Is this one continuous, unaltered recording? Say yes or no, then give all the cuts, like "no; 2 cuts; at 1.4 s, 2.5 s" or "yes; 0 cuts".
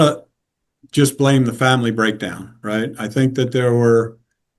yes; 0 cuts